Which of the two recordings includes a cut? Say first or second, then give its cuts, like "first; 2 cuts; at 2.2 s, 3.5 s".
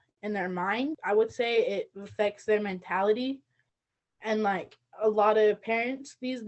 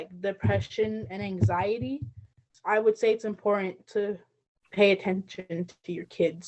first; 1 cut; at 1.0 s